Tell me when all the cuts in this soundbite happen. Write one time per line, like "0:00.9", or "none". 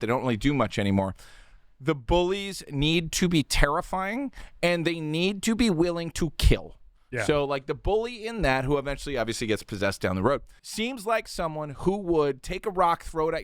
0:10.8

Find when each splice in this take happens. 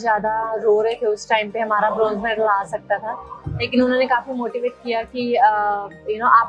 none

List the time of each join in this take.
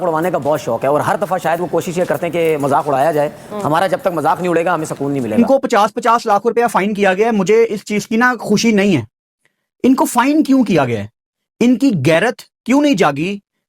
0:05.4

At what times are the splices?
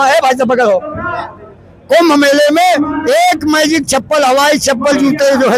none

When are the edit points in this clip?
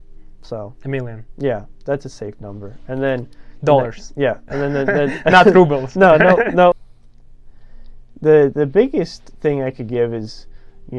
0:06.8

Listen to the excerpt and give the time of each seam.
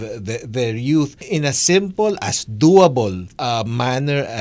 0:01.2
0:03.3

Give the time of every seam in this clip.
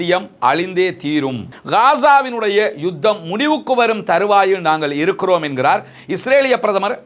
0:01.5

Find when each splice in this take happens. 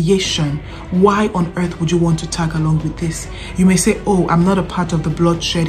none

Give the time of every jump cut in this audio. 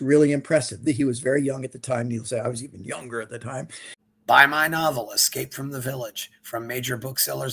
0:04.0

